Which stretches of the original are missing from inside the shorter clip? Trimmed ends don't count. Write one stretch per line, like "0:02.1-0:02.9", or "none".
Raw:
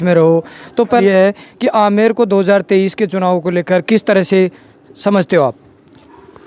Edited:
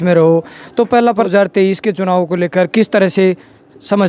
0:01.1-0:02.2